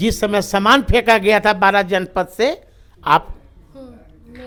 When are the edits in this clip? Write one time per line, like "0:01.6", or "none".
none